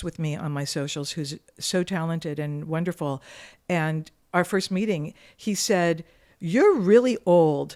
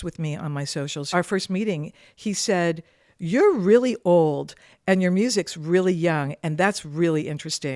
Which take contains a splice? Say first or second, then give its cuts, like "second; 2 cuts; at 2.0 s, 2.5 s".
second; 1 cut; at 1.0 s